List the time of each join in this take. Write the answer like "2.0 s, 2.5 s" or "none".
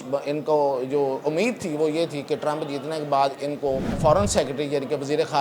4.0 s